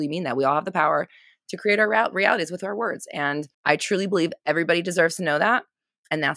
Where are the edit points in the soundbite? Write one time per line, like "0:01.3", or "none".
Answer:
0:03.5